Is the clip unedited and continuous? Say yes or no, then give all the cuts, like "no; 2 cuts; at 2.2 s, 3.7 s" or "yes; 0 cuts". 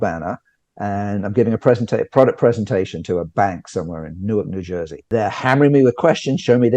no; 1 cut; at 5.1 s